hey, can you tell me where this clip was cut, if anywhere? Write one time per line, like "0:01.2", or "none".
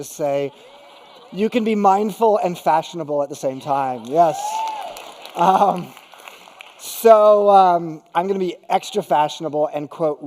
none